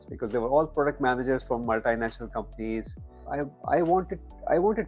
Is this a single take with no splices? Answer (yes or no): no